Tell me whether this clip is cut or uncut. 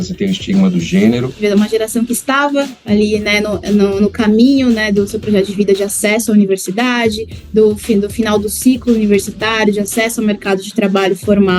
cut